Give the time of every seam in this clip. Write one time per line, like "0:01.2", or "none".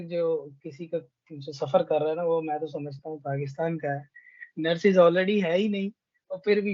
none